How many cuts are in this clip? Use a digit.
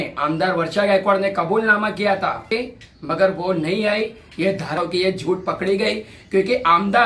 2